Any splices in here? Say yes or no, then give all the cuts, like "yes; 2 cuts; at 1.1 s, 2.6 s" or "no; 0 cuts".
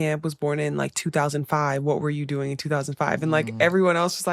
no; 0 cuts